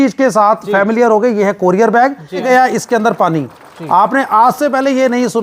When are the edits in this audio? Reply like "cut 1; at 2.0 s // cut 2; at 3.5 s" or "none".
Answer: cut 1; at 2.4 s